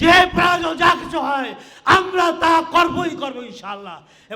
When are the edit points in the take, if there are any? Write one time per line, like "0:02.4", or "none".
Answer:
none